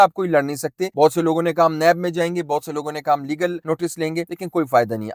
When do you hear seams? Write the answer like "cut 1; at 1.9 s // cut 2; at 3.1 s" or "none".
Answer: none